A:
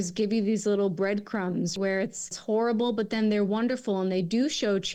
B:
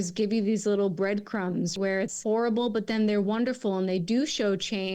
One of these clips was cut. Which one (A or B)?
B